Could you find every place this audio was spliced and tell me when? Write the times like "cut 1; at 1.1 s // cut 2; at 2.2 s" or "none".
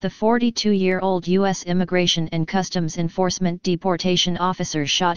cut 1; at 1.0 s